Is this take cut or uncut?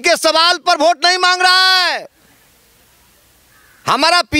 uncut